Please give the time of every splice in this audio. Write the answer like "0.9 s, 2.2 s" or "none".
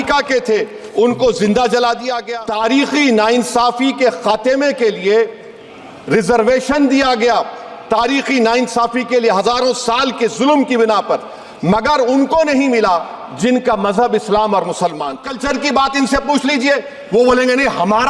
2.2 s, 15.3 s